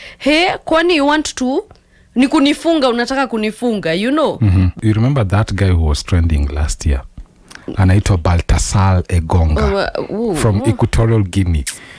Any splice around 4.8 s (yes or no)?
yes